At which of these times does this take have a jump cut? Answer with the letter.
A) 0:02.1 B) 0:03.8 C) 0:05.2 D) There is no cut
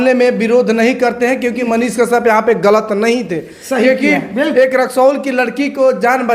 D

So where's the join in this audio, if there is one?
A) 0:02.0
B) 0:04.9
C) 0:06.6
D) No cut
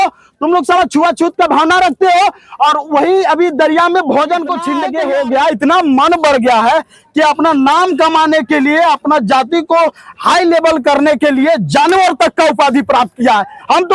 B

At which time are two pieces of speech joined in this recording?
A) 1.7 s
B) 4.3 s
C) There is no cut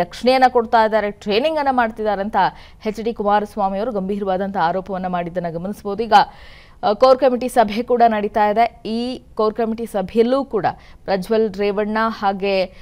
C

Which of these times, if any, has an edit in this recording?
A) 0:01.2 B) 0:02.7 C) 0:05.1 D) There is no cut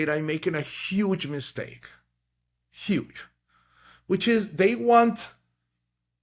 D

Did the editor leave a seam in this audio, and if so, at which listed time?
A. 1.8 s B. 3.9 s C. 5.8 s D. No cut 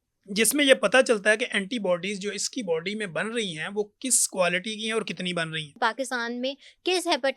C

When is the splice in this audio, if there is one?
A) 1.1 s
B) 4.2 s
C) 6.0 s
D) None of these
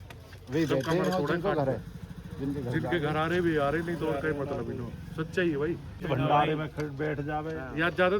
C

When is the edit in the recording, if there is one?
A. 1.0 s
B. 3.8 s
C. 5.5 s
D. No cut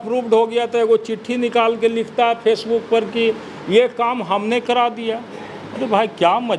D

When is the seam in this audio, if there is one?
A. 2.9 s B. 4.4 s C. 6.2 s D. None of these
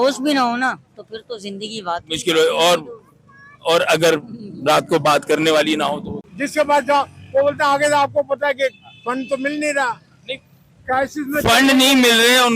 C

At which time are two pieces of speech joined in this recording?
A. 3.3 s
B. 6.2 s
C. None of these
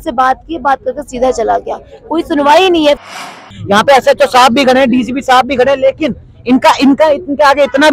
A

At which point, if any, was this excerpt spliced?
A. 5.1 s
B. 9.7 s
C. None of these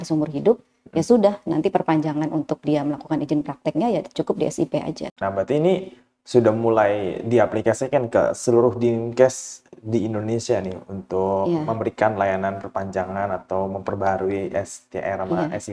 A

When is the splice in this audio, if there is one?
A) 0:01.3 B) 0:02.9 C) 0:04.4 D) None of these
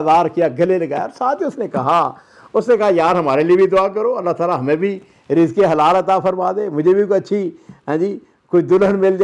D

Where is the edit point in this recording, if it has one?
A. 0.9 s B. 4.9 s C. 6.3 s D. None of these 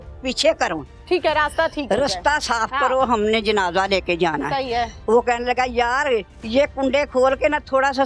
B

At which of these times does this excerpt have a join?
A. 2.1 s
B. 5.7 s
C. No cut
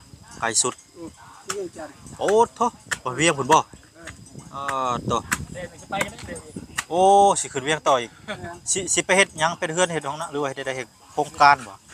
C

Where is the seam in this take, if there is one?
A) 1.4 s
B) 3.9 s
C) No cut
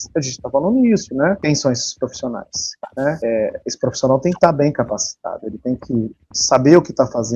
A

